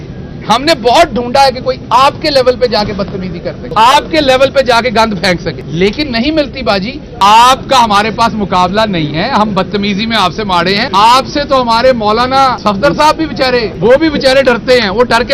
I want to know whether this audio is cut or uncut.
cut